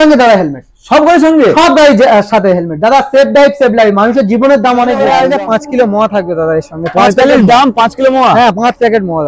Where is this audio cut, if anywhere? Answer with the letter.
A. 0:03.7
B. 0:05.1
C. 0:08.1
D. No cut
B